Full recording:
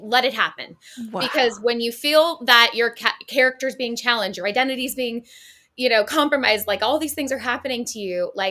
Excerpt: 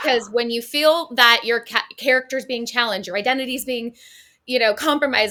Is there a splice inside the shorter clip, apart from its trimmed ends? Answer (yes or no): no